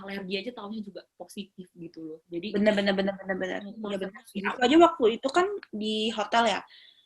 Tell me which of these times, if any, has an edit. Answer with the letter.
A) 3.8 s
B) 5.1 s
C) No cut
A